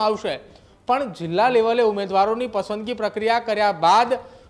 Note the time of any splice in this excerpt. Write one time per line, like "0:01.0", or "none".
none